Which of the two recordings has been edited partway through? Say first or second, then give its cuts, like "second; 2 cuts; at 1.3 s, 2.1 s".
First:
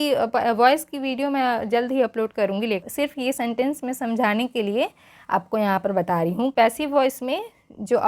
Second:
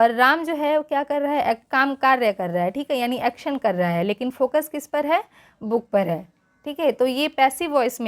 first; 2 cuts; at 2.8 s, 6.5 s